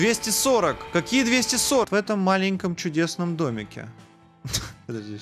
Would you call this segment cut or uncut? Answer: cut